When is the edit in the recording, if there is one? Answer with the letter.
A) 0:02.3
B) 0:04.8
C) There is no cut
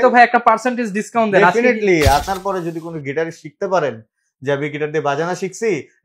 A